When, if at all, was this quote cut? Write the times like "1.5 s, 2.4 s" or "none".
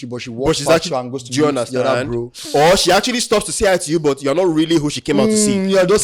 none

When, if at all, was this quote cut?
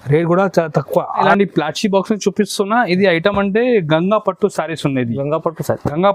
1.3 s

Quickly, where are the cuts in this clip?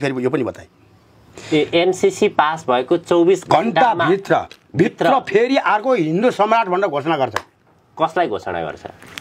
none

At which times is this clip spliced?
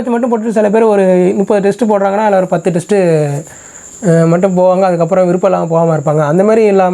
none

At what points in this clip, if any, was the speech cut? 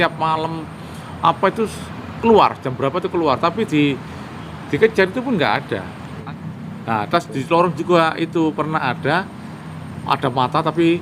6.2 s

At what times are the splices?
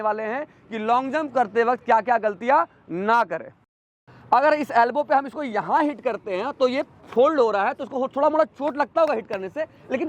3.9 s

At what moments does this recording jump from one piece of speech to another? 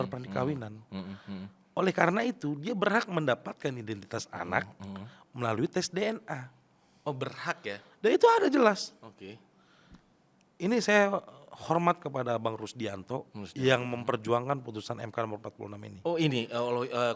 none

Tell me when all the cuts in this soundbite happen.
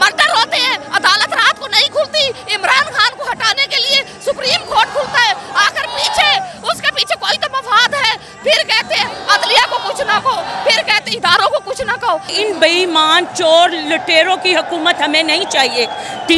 12.3 s

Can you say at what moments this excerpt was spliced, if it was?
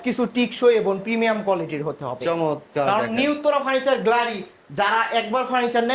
none

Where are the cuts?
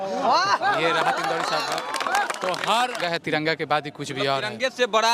3.0 s

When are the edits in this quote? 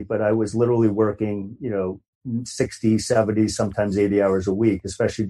2.1 s

